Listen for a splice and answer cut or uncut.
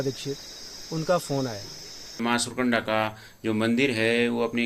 cut